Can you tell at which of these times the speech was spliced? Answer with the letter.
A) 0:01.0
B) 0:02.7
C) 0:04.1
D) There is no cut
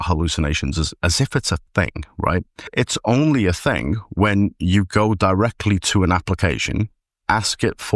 B